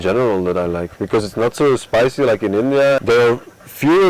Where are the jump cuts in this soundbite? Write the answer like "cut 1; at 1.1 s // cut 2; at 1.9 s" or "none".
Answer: cut 1; at 3.0 s